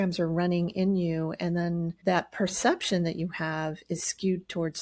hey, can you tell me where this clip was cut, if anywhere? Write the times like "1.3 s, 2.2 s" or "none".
1.9 s